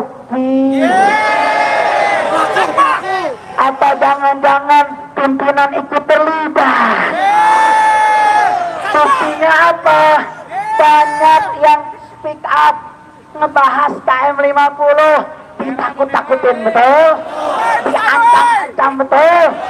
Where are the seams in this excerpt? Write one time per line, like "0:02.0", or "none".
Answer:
none